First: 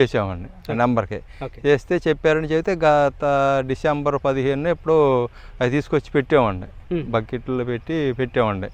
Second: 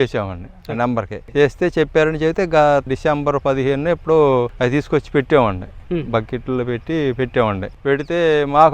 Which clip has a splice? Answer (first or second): second